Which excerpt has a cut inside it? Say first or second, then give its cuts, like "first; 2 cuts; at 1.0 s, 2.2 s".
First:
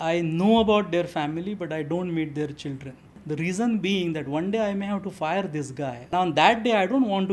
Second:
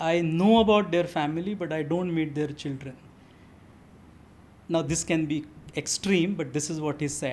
first; 2 cuts; at 3.1 s, 6.0 s